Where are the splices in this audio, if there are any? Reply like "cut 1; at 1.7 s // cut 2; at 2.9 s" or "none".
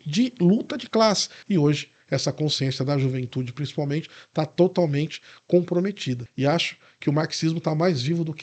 cut 1; at 1.3 s // cut 2; at 6.2 s